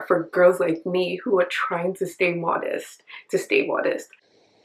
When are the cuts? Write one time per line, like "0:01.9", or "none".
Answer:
none

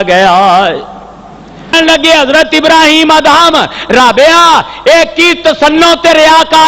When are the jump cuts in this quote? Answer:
0:01.7

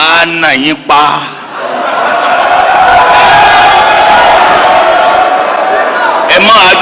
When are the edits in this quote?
none

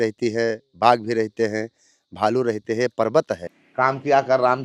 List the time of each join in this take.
0:03.6

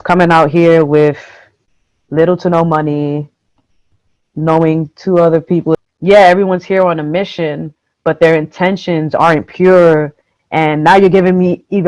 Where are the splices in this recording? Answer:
0:05.8

